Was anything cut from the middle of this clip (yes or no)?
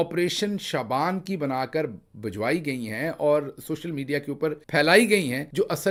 no